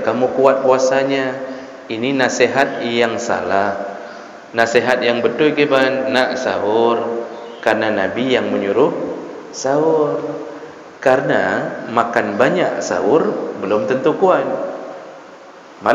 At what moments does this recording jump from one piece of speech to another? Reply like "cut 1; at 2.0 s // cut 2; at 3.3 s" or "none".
none